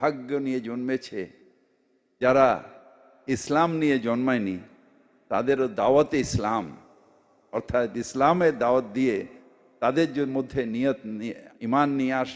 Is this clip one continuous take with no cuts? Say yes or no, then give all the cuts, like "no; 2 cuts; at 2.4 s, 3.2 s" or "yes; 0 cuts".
yes; 0 cuts